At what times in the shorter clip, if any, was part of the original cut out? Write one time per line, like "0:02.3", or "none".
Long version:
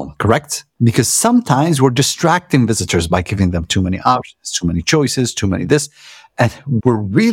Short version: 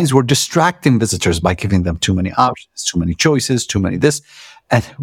none